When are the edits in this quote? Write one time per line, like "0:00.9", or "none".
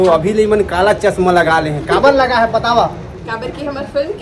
none